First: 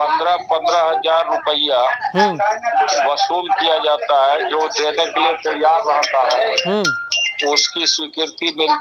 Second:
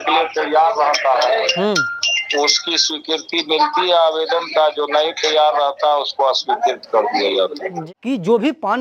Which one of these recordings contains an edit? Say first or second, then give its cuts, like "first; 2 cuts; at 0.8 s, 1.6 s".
second; 1 cut; at 7.6 s